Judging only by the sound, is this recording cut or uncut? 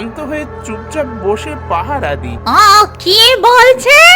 cut